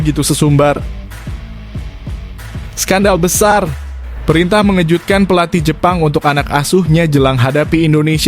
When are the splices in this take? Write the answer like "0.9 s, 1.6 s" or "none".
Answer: 1.0 s, 2.8 s